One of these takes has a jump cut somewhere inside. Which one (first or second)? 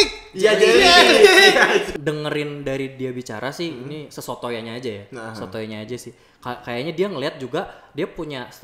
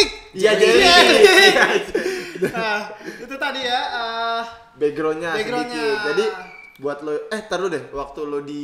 first